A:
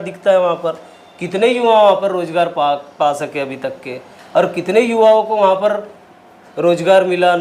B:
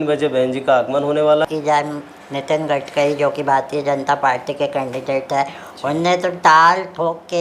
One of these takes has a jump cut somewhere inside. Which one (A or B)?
B